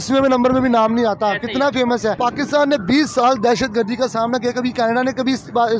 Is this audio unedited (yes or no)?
no